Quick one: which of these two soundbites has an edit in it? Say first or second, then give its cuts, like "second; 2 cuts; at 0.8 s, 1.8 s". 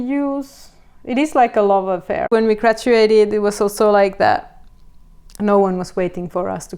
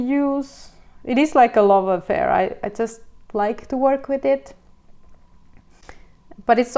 first; 1 cut; at 2.3 s